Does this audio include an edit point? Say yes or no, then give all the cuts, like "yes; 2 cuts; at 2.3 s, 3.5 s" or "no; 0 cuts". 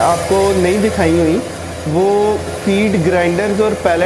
no; 0 cuts